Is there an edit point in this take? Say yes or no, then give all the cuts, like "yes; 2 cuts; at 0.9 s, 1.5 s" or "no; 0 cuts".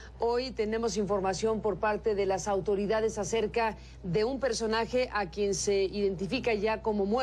no; 0 cuts